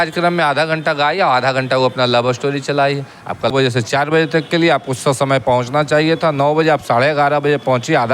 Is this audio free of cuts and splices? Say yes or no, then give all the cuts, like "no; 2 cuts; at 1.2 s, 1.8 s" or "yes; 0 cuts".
no; 1 cut; at 3.5 s